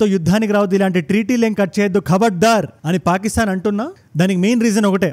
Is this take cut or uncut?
uncut